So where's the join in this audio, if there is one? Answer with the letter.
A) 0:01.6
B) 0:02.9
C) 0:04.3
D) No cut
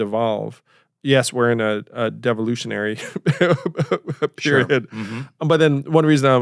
D